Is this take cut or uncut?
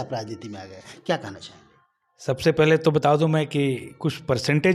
uncut